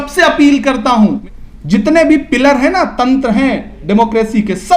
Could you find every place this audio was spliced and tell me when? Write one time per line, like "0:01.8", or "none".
0:01.2